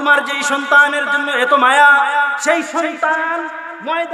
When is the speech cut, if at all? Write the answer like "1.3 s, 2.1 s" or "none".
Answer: 2.3 s